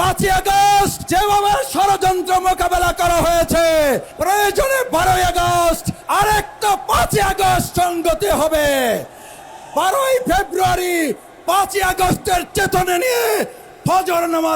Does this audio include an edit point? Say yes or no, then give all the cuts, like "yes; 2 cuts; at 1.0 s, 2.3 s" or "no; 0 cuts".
yes; 3 cuts; at 1.0 s, 4.1 s, 5.9 s